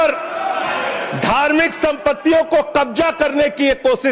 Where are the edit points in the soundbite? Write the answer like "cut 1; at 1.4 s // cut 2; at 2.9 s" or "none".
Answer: none